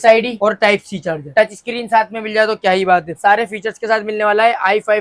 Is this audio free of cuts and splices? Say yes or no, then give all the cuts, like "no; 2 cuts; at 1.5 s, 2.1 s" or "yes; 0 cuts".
no; 2 cuts; at 1.3 s, 3.1 s